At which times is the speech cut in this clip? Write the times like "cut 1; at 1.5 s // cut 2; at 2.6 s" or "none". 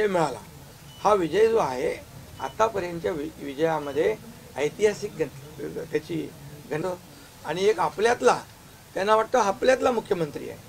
cut 1; at 6.8 s